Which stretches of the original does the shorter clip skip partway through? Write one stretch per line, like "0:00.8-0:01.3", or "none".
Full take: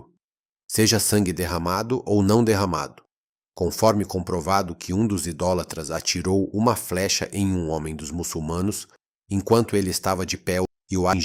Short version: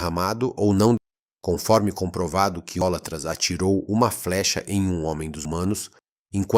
0:02.5-0:03.1
0:04.9-0:05.5
0:08.1-0:08.4

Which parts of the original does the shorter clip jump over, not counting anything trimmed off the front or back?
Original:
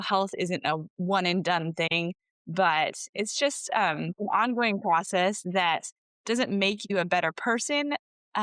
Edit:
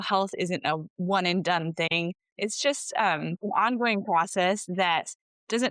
0:02.3-0:03.0

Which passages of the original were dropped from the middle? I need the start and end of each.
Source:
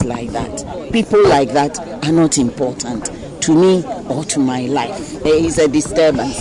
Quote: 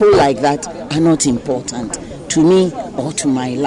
none

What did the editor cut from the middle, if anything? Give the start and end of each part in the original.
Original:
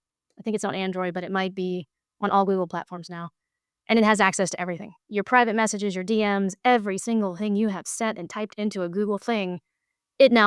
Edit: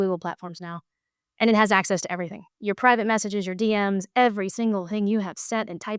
none

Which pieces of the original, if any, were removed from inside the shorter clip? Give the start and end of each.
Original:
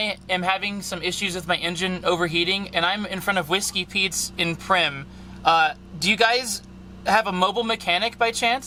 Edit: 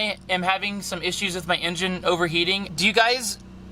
0:02.6-0:05.9

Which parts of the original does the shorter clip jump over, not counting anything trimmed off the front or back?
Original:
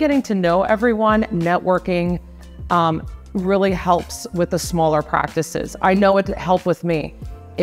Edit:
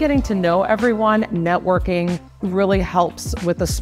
0:02.3-0:03.2

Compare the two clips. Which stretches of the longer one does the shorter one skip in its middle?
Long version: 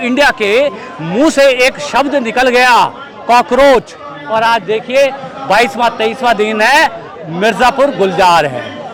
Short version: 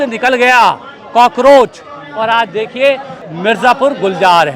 0:05.3-0:07.1

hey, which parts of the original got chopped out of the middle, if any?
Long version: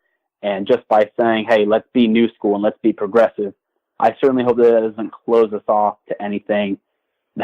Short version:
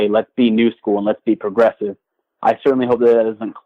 none

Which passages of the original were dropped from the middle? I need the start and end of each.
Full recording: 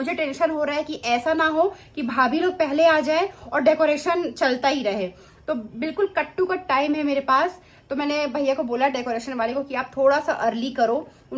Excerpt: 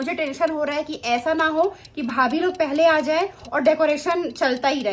none

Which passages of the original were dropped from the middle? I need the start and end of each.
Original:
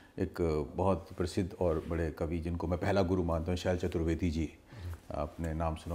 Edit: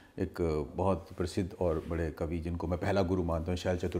none

